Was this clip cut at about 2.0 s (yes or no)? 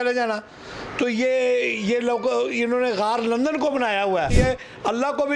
no